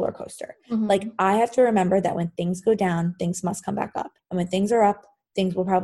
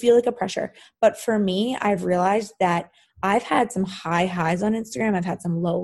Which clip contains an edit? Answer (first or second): first